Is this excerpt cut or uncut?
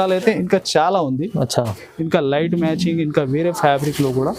uncut